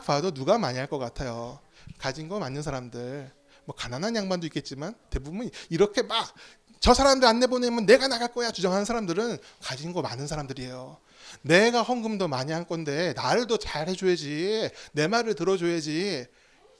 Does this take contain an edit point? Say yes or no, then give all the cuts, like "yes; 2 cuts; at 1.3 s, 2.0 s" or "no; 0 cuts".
no; 0 cuts